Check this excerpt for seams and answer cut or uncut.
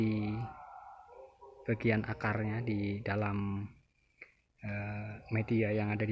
uncut